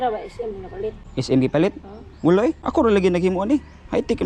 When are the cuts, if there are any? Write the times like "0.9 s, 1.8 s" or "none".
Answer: 1.0 s, 2.6 s